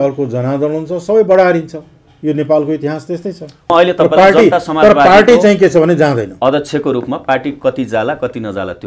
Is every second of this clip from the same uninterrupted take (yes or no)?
no